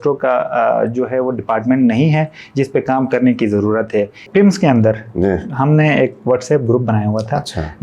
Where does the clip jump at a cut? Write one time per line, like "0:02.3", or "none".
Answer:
0:04.2